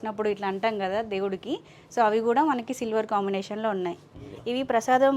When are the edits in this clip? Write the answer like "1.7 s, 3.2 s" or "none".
none